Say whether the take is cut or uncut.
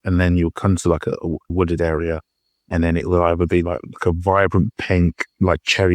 cut